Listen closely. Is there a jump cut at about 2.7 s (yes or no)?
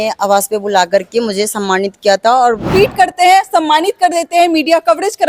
yes